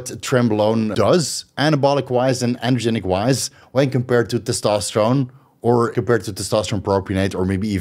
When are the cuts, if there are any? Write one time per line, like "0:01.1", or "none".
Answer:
0:00.9
0:05.9